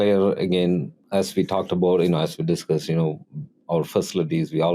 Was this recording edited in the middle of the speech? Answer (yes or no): yes